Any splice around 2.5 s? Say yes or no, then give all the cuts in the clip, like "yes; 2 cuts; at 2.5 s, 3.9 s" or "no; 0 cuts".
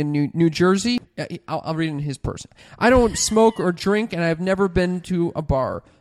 yes; 2 cuts; at 1.0 s, 2.5 s